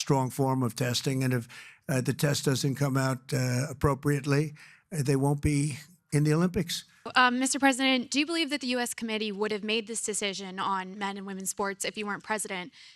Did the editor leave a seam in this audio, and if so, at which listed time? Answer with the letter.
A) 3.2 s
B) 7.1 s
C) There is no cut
B